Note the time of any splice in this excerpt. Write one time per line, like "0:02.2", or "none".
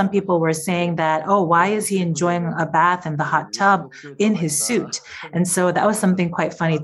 none